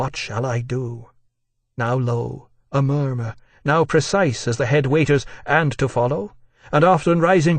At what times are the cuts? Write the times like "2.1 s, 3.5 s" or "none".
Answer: 5.9 s